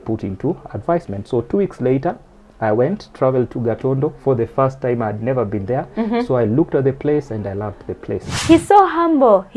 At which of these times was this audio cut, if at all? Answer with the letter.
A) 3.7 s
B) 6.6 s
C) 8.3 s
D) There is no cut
C